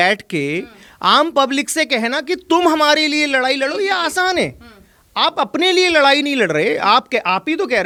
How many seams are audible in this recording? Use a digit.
0